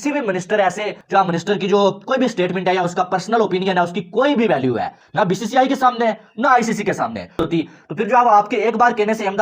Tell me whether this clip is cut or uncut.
uncut